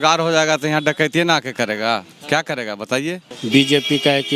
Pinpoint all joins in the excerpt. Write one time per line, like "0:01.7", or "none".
0:03.3